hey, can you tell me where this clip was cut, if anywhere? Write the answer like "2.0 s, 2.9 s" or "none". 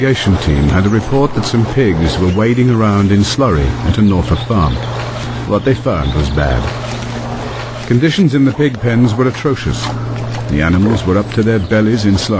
3.3 s